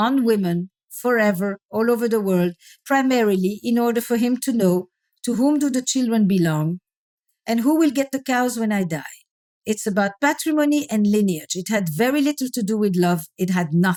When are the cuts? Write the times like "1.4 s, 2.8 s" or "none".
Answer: none